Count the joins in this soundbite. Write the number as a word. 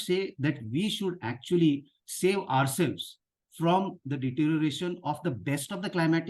zero